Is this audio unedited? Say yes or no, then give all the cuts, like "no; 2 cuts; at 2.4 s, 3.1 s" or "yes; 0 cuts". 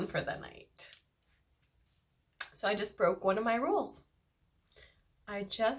no; 1 cut; at 1.8 s